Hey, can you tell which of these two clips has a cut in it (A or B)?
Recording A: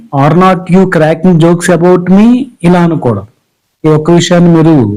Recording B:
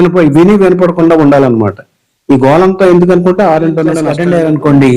B